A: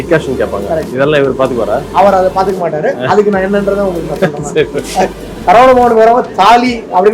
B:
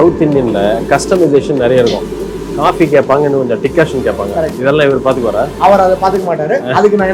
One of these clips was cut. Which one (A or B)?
A